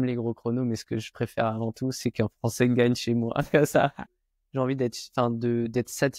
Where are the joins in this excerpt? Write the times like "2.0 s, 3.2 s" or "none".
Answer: 4.1 s